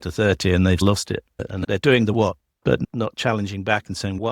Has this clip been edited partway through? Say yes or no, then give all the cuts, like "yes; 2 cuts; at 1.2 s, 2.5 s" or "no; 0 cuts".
no; 0 cuts